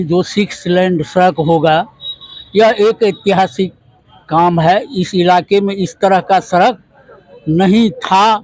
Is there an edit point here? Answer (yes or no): no